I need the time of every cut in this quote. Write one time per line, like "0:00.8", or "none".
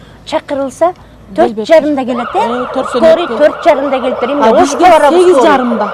none